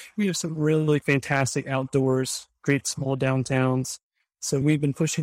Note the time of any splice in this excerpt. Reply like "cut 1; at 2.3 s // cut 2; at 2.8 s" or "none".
cut 1; at 1.0 s